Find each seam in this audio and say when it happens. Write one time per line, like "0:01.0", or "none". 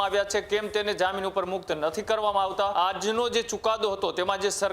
0:02.7